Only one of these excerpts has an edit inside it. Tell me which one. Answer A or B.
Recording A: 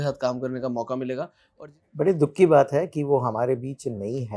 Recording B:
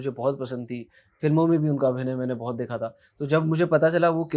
A